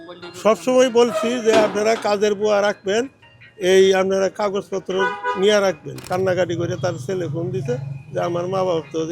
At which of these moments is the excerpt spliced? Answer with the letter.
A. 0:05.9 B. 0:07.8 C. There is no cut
A